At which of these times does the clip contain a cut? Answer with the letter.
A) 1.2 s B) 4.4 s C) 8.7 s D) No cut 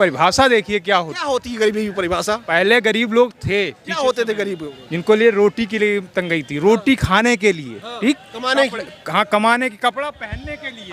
D